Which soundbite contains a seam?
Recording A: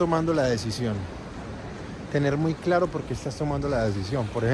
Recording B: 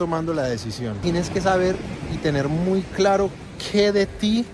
B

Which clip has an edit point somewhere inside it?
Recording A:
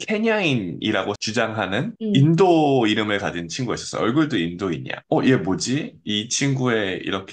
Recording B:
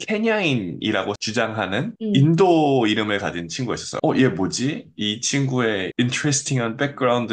B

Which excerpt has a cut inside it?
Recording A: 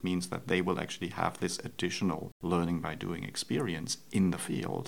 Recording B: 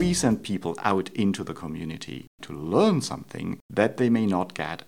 B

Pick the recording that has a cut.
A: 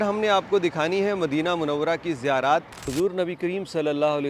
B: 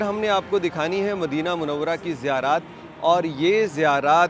A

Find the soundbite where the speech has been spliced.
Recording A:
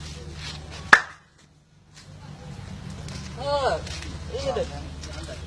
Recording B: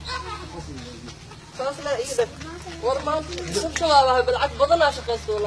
A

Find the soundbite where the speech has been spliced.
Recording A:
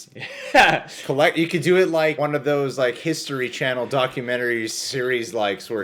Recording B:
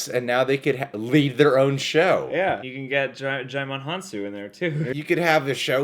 B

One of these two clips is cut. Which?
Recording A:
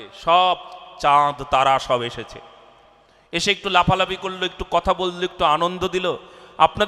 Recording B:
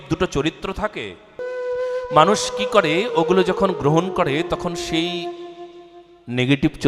B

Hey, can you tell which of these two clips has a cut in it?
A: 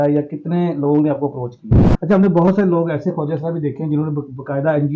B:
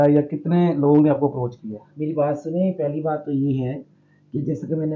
A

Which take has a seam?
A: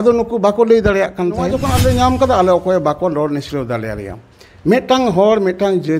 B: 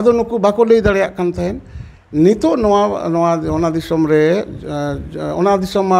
A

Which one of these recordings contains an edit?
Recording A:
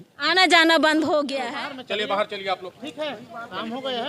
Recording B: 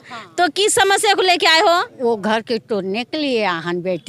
A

